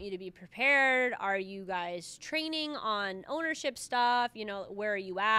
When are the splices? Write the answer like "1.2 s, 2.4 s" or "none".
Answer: none